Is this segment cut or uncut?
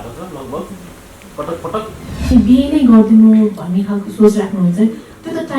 cut